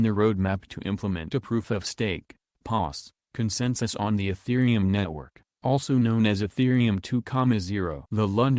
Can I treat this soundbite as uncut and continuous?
no; 1 cut; at 7.6 s

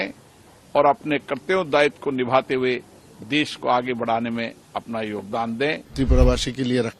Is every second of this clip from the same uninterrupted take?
no; 1 cut; at 5.8 s

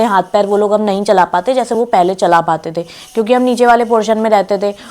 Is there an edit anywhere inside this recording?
no; 0 cuts

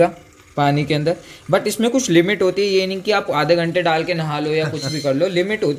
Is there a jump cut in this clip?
no; 0 cuts

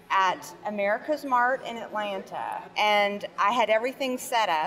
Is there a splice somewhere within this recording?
yes; 1 cut; at 2.6 s

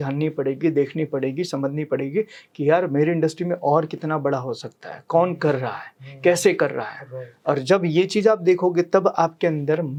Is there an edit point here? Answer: no; 0 cuts

